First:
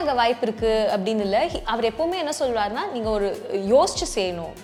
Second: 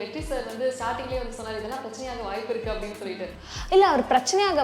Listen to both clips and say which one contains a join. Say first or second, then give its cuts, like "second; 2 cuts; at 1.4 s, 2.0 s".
second; 1 cut; at 3.4 s